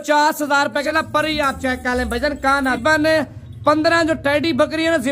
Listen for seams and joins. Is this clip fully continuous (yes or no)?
no